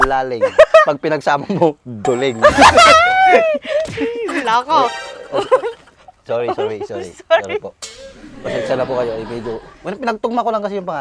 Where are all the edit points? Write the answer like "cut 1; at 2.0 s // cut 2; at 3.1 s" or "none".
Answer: none

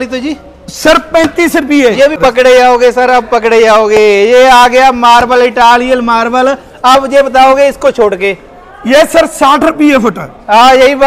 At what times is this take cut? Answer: cut 1; at 2.2 s

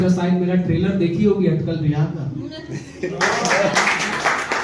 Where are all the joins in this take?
none

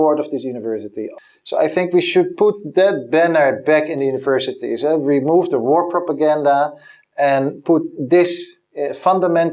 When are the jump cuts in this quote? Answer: cut 1; at 1.0 s

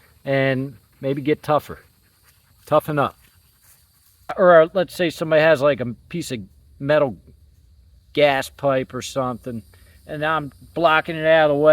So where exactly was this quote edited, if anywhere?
cut 1; at 4.3 s

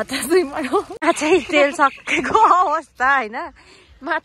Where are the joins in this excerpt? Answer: cut 1; at 0.9 s

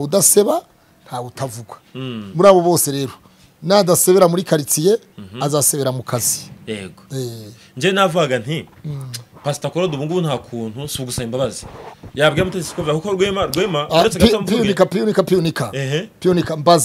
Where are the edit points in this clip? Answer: none

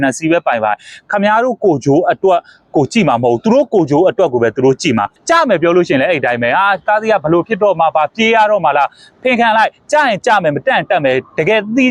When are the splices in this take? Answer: cut 1; at 5.2 s

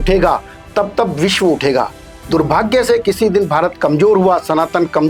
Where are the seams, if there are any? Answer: none

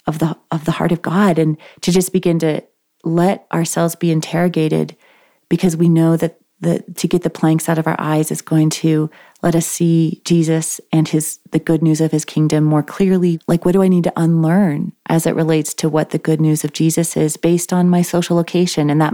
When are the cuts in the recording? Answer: cut 1; at 13.4 s

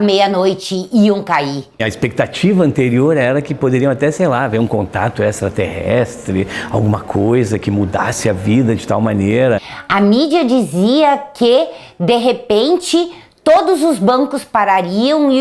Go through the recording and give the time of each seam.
cut 1; at 1.9 s // cut 2; at 9.7 s

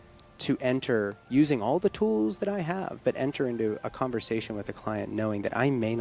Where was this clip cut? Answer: none

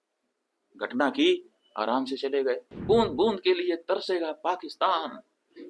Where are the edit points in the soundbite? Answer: cut 1; at 2.7 s

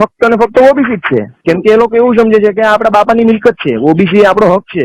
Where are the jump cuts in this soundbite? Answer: cut 1; at 1.3 s

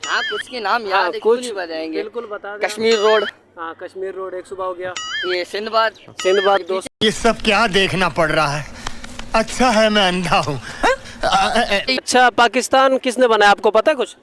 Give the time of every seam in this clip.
cut 1; at 6.8 s // cut 2; at 12.1 s

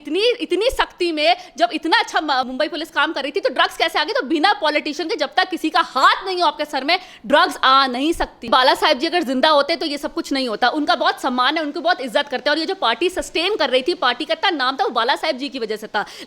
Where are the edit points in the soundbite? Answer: cut 1; at 8.5 s

